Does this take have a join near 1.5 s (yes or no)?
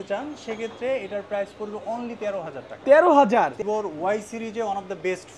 no